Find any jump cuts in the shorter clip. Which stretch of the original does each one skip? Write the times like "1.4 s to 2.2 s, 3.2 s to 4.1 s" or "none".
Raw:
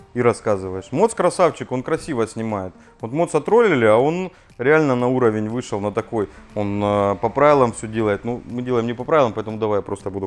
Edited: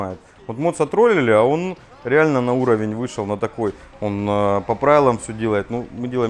none